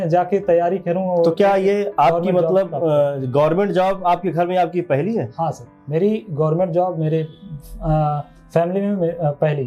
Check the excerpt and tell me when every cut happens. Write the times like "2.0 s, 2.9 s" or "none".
none